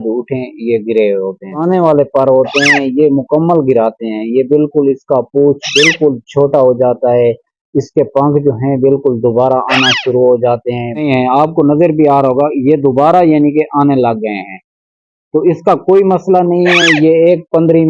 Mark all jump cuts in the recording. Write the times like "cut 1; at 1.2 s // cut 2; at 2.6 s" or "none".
cut 1; at 1.6 s // cut 2; at 11.0 s

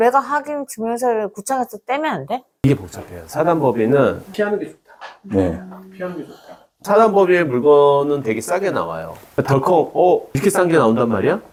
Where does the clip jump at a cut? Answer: none

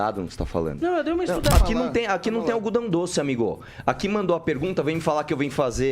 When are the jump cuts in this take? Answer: cut 1; at 1.5 s

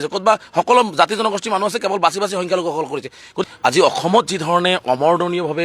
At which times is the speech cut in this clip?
cut 1; at 3.4 s

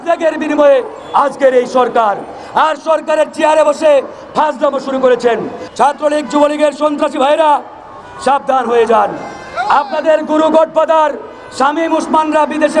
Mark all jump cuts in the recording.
cut 1; at 5.6 s

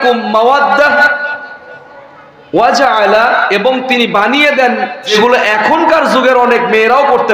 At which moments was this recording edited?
cut 1; at 5.1 s

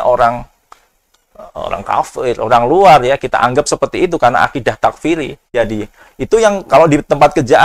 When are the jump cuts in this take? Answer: cut 1; at 5.5 s

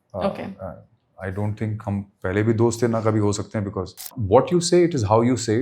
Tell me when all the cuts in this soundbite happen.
cut 1; at 4.1 s

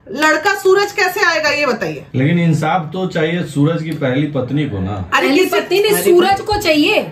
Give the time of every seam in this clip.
none

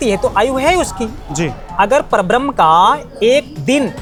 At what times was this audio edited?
none

